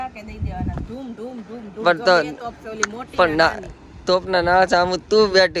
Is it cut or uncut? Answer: uncut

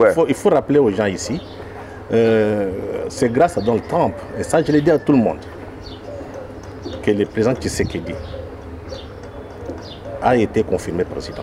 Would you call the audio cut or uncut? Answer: uncut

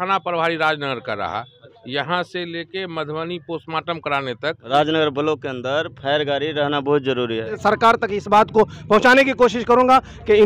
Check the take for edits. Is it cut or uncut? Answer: cut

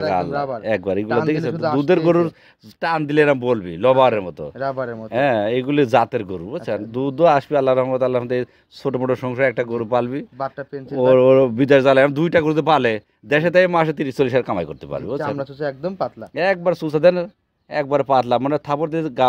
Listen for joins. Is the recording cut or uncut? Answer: uncut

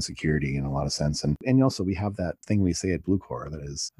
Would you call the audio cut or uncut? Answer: cut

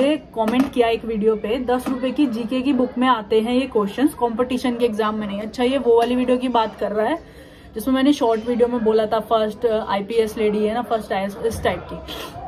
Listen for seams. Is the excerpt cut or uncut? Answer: uncut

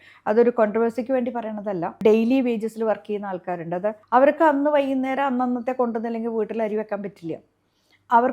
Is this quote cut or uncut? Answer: cut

